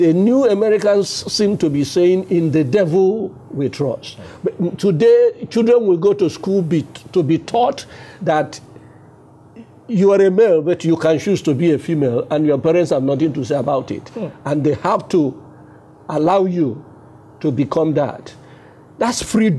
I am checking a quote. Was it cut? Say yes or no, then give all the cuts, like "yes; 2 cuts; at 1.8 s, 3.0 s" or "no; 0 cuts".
no; 0 cuts